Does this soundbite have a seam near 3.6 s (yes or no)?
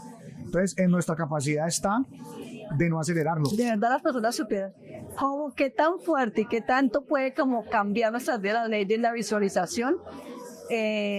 yes